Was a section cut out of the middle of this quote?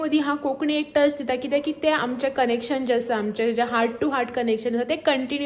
no; 0 cuts

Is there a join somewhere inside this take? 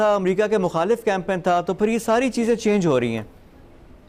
no; 0 cuts

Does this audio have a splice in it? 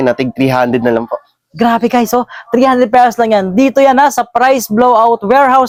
no; 0 cuts

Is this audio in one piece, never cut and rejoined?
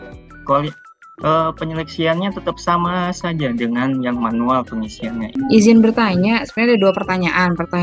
no; 1 cut; at 5.4 s

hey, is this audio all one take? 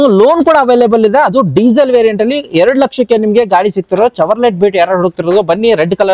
yes; 0 cuts

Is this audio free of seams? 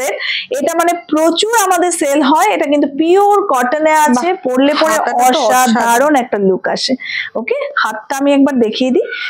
yes; 0 cuts

